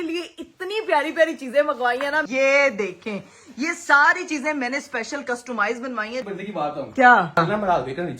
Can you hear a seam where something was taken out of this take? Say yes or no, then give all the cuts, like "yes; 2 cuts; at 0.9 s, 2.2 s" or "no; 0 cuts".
yes; 3 cuts; at 2.2 s, 6.2 s, 7.4 s